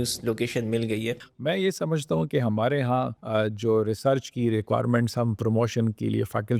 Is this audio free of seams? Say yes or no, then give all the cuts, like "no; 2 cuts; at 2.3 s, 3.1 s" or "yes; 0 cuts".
no; 2 cuts; at 1.3 s, 3.2 s